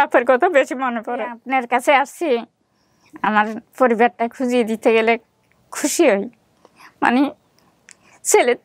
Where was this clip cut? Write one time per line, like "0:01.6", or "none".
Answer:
0:01.4